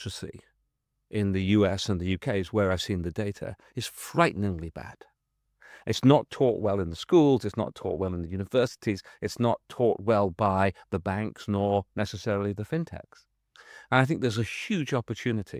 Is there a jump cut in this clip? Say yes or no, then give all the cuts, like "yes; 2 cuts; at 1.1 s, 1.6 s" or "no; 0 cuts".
no; 0 cuts